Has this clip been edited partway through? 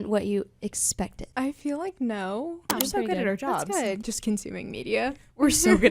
yes; 3 cuts; at 1.2 s, 2.7 s, 4.0 s

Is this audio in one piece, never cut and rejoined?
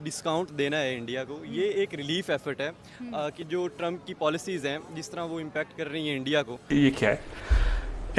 no; 1 cut; at 6.7 s

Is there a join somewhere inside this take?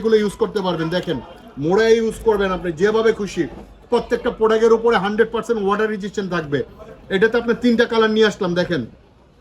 no; 0 cuts

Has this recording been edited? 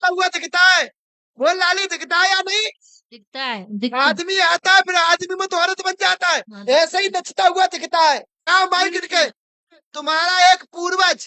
yes; 1 cut; at 8.3 s

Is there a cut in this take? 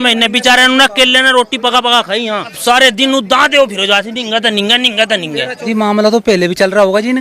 yes; 2 cuts; at 2.6 s, 5.6 s

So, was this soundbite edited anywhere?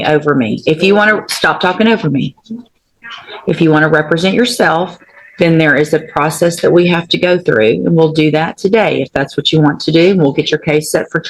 no; 0 cuts

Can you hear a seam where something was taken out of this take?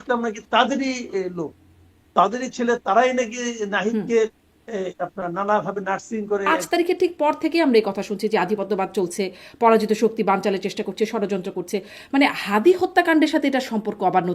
yes; 1 cut; at 6.5 s

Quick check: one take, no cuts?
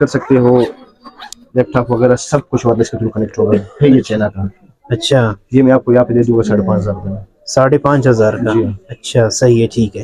yes; 0 cuts

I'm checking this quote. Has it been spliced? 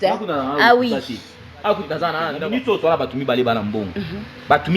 yes; 1 cut; at 2.4 s

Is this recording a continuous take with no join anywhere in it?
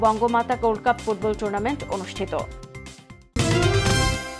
no; 1 cut; at 3.3 s

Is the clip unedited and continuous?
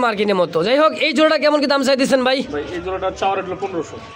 yes; 0 cuts

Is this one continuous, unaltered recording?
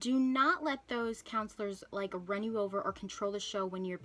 yes; 0 cuts

